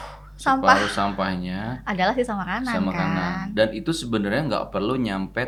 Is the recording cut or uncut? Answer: uncut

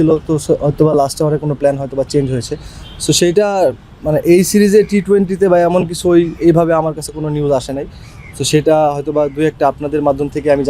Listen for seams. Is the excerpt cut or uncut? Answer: uncut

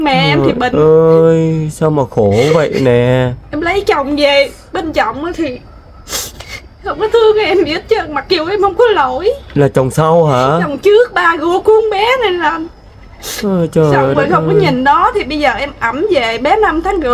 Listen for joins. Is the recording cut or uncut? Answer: uncut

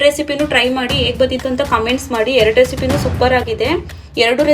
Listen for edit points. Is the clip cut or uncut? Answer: uncut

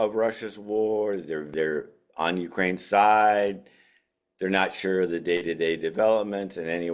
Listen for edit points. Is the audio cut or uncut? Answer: cut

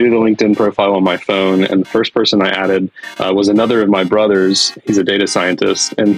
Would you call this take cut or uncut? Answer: uncut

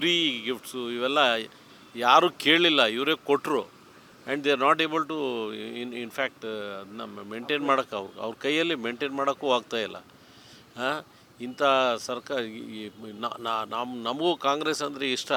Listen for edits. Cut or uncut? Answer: uncut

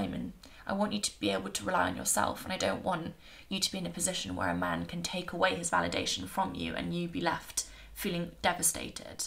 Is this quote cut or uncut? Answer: uncut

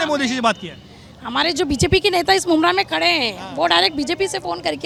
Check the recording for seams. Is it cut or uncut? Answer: uncut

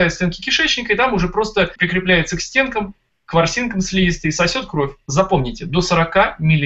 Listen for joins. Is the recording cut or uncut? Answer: uncut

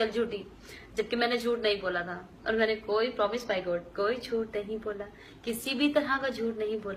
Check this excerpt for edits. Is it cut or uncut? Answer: cut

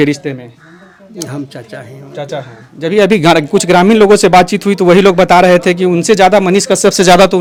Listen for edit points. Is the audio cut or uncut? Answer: uncut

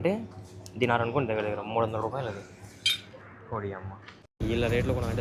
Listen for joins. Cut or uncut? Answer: cut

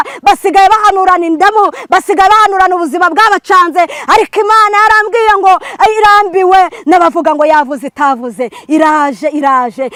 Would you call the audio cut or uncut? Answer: uncut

